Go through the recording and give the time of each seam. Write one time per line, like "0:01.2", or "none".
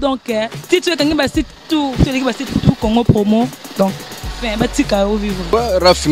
none